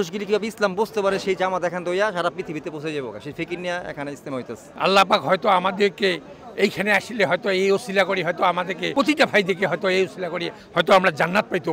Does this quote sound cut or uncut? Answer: uncut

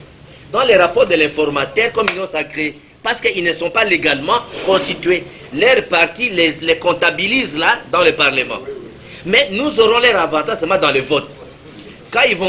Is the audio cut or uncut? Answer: uncut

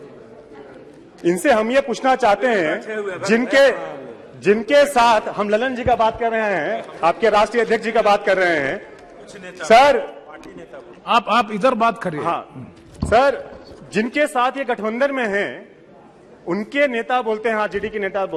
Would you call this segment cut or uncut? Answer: uncut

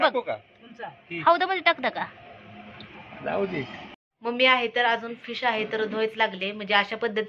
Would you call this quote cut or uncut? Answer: uncut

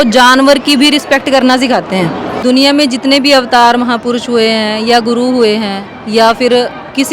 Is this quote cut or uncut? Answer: cut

